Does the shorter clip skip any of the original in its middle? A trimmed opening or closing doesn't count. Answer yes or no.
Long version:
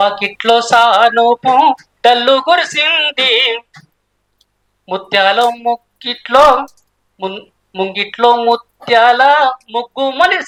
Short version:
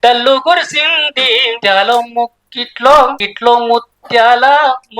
yes